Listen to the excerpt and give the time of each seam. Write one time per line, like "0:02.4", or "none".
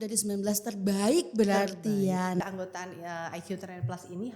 0:02.4